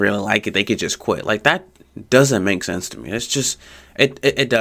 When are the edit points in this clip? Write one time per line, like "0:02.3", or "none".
none